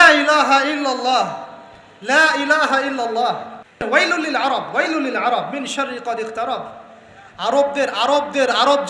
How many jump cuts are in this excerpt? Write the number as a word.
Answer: one